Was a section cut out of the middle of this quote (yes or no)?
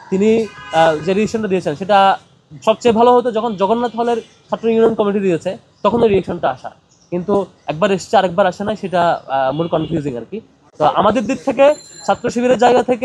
no